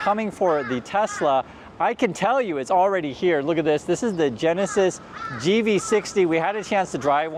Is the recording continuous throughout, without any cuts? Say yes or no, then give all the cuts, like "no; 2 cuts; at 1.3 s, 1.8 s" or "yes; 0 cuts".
yes; 0 cuts